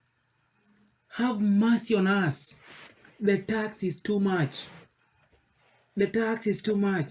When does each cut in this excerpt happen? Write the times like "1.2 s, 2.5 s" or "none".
none

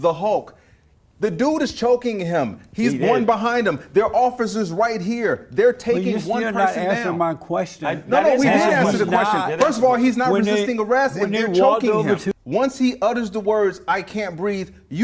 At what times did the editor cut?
12.3 s

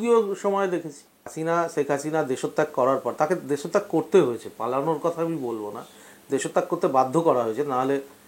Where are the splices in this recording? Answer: 1.3 s

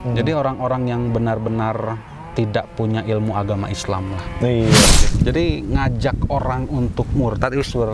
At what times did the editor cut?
5.0 s

